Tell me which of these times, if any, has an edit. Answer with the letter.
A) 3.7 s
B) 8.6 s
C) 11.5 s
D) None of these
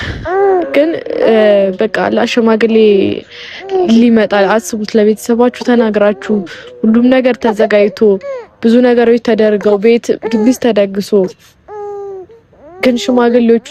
D